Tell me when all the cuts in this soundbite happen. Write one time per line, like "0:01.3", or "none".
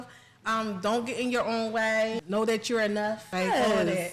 0:02.2
0:03.2